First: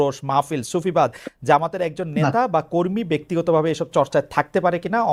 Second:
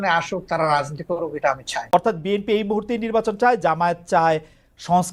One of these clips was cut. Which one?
second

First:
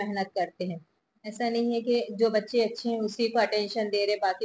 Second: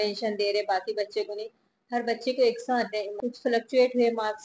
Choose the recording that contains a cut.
second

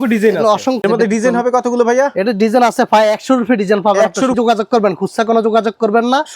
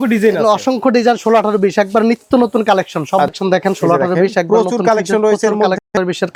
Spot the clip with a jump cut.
first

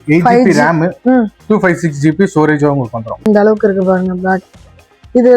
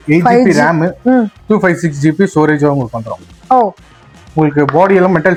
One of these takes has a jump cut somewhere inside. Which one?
first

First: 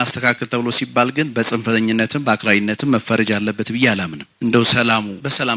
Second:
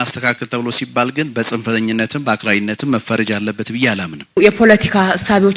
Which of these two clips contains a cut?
second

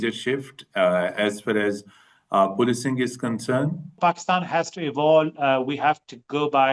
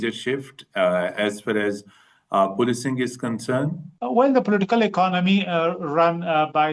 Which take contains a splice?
first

